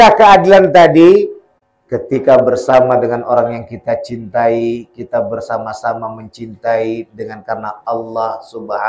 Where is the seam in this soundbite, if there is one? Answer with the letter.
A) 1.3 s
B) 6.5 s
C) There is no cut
C